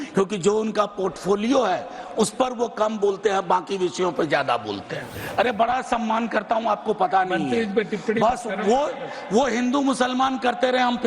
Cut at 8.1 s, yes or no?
no